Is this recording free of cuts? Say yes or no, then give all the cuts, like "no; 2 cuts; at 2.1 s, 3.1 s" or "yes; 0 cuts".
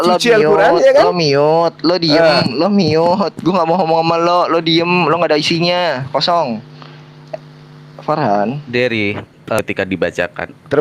no; 1 cut; at 9.6 s